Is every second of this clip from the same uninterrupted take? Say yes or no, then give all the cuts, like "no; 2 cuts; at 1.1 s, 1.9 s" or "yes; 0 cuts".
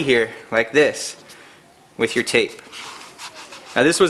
yes; 0 cuts